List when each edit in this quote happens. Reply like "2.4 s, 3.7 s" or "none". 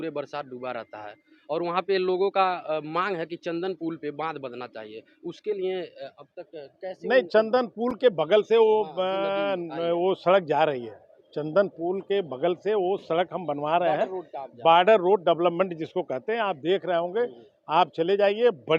none